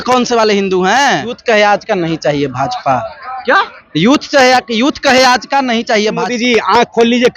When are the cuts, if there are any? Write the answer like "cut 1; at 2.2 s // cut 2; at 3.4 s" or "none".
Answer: cut 1; at 1.4 s // cut 2; at 6.3 s